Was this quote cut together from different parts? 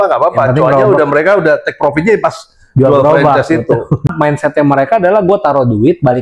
yes; 1 cut; at 4.1 s

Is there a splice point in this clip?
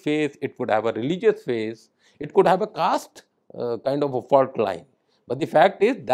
no; 0 cuts

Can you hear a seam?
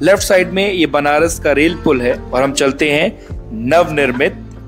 yes; 1 cut; at 2.2 s

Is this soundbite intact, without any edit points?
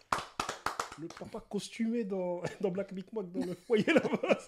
no; 1 cut; at 0.9 s

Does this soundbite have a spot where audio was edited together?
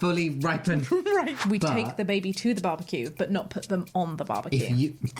yes; 1 cut; at 1.4 s

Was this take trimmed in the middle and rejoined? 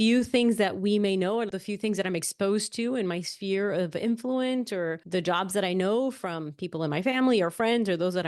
yes; 2 cuts; at 1.5 s, 5.0 s

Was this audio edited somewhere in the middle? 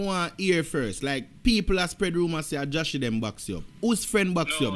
no; 0 cuts

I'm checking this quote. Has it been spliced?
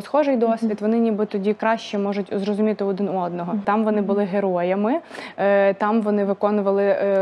yes; 1 cut; at 3.6 s

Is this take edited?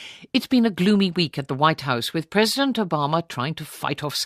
yes; 1 cut; at 3.0 s

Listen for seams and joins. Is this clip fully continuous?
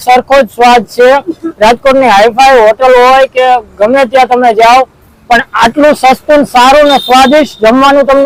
yes; 0 cuts

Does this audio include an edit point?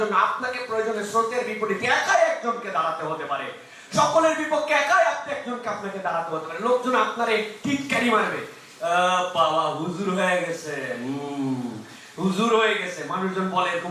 no; 0 cuts

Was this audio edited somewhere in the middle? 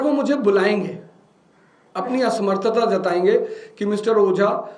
no; 0 cuts

